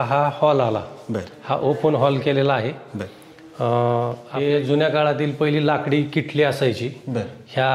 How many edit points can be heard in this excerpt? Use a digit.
1